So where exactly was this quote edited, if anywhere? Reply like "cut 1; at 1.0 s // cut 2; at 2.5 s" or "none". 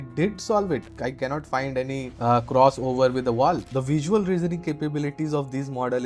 cut 1; at 0.9 s // cut 2; at 2.1 s // cut 3; at 3.7 s